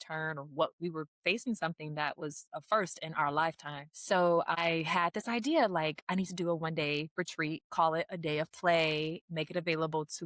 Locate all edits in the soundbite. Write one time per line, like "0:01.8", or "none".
none